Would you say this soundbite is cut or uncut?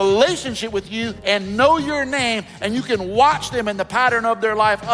cut